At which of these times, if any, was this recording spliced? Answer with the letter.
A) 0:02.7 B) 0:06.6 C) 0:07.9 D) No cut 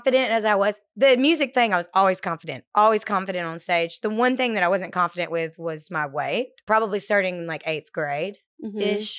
B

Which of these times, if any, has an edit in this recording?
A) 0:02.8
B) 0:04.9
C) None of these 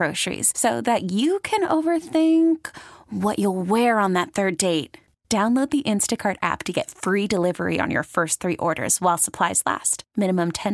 C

